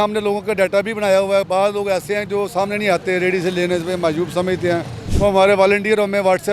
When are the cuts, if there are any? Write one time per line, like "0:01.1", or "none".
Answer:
0:05.0